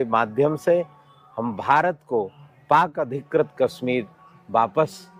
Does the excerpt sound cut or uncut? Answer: uncut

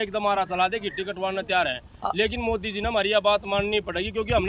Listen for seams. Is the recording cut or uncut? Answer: uncut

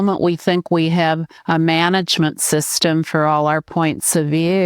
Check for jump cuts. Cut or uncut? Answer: cut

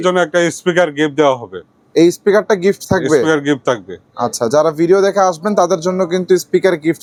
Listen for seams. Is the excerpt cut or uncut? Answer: uncut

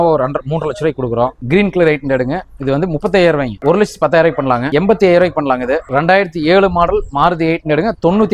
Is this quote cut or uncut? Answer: cut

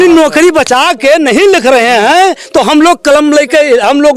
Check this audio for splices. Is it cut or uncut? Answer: uncut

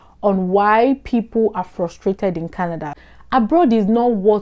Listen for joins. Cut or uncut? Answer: cut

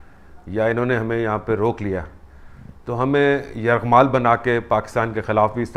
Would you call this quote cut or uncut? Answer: uncut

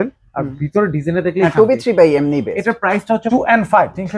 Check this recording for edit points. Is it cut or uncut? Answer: cut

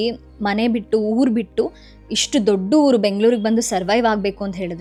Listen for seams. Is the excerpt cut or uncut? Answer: uncut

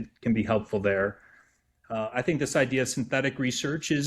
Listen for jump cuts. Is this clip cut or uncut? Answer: uncut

